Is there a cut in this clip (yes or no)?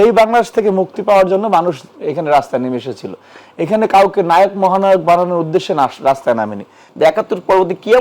yes